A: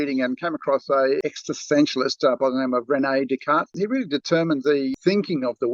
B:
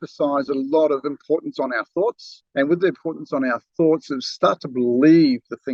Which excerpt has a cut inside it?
A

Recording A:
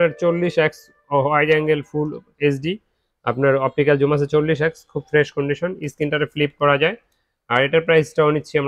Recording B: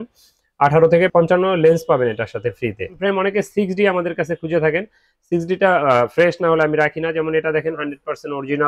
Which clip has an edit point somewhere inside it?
B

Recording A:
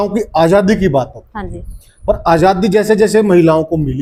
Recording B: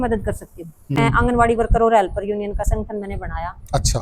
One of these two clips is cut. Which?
B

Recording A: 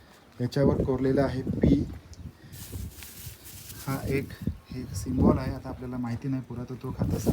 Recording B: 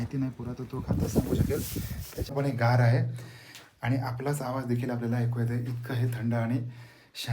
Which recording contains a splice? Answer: B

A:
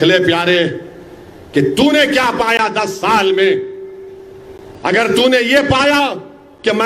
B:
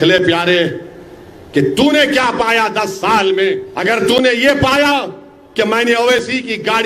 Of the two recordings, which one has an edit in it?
B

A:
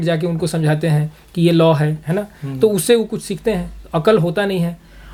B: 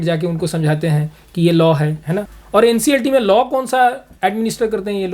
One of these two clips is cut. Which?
B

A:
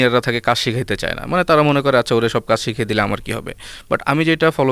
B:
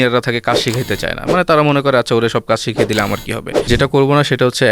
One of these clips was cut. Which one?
B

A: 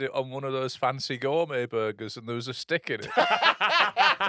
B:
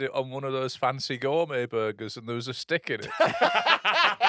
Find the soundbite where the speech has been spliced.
A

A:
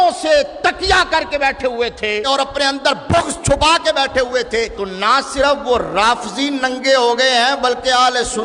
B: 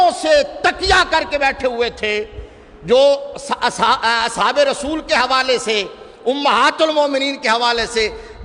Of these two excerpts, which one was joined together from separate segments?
A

